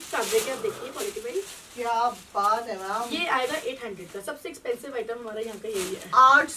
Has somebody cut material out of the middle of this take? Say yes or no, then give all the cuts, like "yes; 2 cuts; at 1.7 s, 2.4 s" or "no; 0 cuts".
no; 0 cuts